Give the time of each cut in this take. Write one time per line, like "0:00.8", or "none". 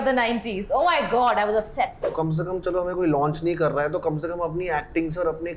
0:02.1